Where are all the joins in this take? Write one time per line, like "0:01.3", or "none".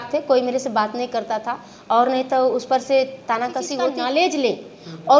0:03.8